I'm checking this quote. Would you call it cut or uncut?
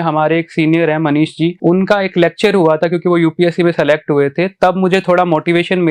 uncut